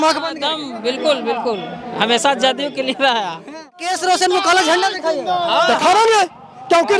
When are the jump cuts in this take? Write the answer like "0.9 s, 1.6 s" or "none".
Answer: 3.8 s